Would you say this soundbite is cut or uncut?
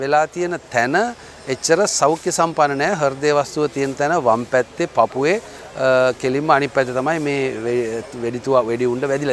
uncut